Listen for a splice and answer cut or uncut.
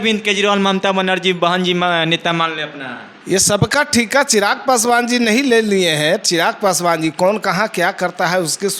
uncut